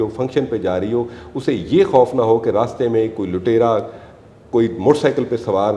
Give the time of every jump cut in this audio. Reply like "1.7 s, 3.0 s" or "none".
none